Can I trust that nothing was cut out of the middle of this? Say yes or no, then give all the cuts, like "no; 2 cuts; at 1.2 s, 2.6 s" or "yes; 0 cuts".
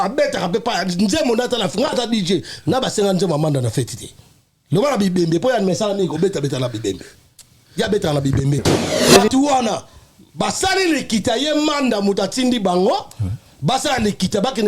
no; 1 cut; at 8.9 s